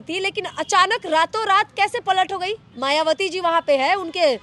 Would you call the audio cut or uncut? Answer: cut